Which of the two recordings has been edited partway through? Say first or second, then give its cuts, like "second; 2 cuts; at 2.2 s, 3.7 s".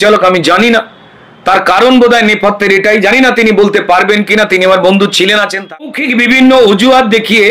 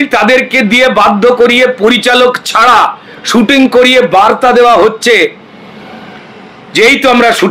first; 1 cut; at 5.9 s